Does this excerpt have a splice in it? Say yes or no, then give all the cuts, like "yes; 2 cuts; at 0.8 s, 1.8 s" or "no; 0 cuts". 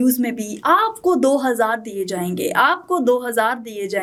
no; 0 cuts